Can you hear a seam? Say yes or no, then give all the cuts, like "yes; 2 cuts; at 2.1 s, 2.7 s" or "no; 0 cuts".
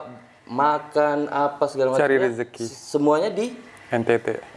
no; 0 cuts